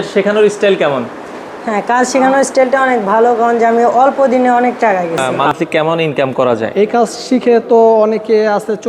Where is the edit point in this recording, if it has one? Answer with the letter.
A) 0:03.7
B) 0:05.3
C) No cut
B